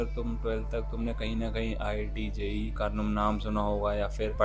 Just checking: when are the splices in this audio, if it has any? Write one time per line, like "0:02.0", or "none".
0:02.7